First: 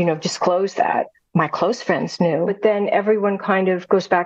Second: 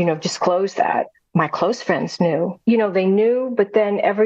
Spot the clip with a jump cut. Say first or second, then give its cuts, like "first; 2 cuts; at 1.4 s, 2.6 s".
first; 1 cut; at 2.5 s